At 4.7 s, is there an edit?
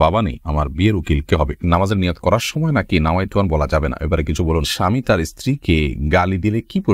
yes; 2 cuts; at 1.7 s, 4.7 s

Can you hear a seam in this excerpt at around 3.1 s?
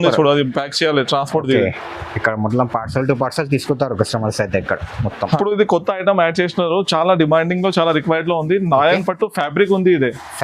no; 1 cut; at 5.4 s

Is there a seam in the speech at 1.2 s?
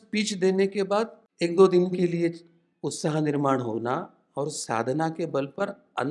yes; 1 cut; at 1.2 s

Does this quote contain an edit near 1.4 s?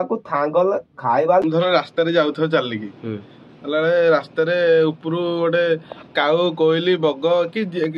yes; 1 cut; at 1.4 s

